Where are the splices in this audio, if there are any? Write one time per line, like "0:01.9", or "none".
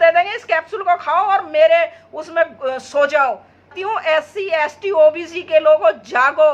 0:03.7